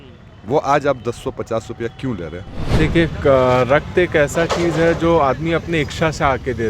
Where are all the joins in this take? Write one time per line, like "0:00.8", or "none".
0:02.6